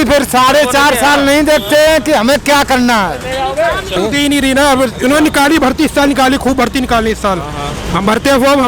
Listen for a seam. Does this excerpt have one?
yes; 1 cut; at 4.0 s

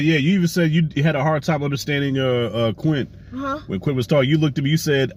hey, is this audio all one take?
yes; 0 cuts

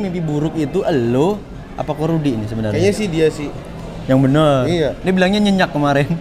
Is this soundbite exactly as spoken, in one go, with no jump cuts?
yes; 0 cuts

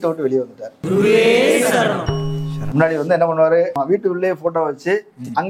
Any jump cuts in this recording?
no; 0 cuts

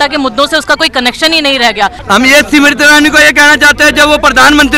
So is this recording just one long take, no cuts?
no; 1 cut; at 2.0 s

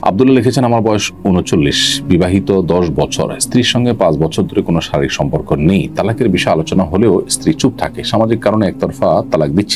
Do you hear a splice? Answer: no; 0 cuts

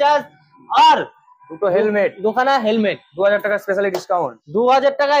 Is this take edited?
no; 0 cuts

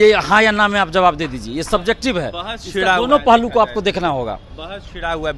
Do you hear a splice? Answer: no; 0 cuts

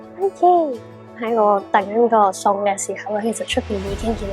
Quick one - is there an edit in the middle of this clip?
yes; 1 cut; at 1.2 s

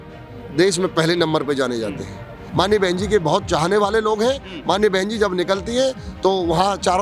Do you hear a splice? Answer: yes; 1 cut; at 2.4 s

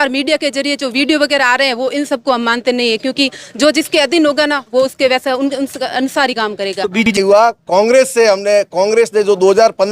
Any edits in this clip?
yes; 1 cut; at 7.1 s

